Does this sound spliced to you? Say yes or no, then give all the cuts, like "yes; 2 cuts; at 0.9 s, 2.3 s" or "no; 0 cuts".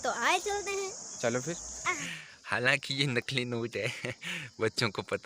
yes; 1 cut; at 1.8 s